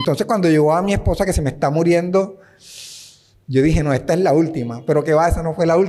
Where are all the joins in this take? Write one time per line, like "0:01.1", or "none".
none